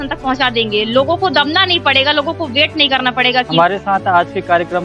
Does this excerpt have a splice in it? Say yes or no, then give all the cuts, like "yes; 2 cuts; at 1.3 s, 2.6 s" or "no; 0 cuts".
yes; 1 cut; at 3.5 s